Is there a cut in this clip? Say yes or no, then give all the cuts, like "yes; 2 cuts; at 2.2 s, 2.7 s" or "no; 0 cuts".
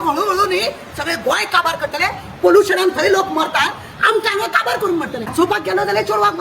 no; 0 cuts